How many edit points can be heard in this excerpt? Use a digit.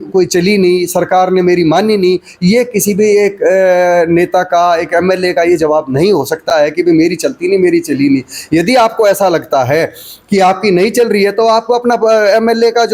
0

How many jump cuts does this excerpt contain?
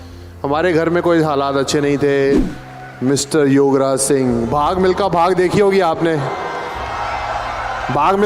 1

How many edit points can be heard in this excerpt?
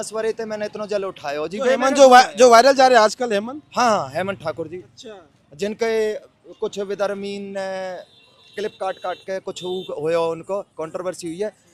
0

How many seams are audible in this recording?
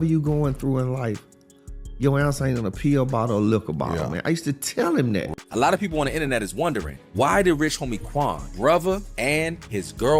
1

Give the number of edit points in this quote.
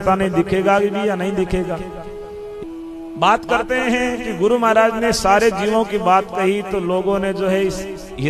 1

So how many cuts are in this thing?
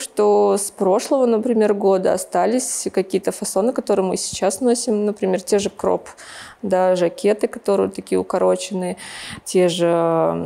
0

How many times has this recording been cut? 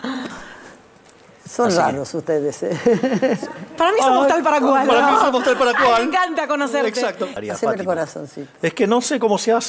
1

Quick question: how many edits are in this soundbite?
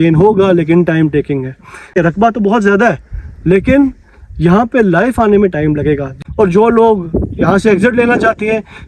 2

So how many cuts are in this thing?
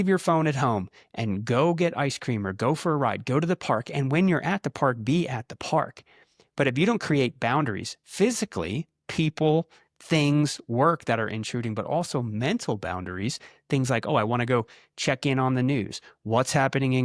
0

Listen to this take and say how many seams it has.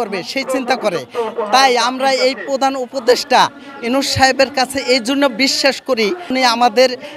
0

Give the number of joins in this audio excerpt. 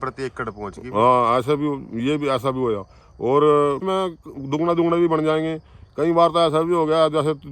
1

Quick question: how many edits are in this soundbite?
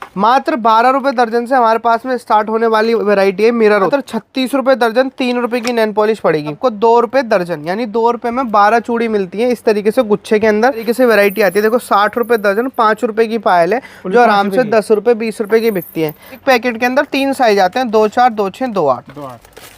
4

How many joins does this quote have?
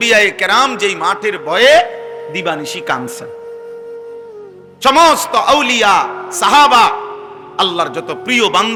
0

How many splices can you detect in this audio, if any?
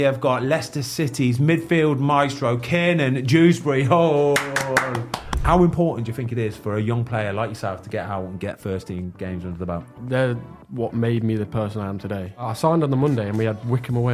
3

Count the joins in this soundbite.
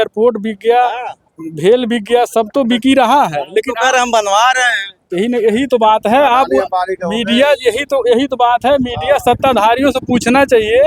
0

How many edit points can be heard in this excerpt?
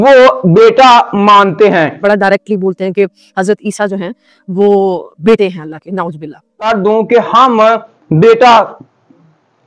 2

